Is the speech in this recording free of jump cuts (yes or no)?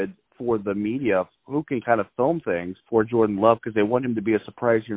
no